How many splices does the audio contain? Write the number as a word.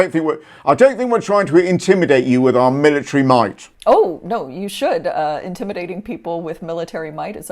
one